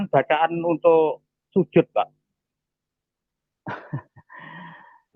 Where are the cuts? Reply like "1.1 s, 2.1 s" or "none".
none